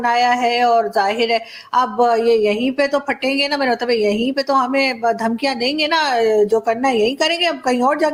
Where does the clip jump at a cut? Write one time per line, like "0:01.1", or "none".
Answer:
none